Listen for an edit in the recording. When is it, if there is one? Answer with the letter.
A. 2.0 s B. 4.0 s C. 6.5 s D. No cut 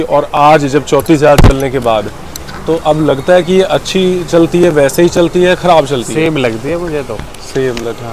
D